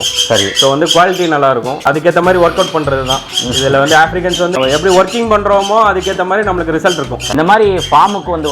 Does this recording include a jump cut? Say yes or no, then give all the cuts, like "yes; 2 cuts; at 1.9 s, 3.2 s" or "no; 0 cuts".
yes; 3 cuts; at 1.9 s, 4.6 s, 7.5 s